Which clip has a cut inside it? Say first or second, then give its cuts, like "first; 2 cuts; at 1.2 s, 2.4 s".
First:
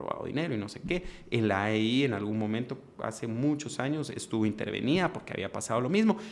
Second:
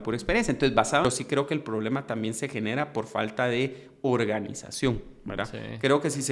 second; 1 cut; at 1.0 s